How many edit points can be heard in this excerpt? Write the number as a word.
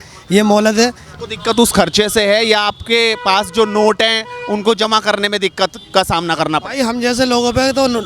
one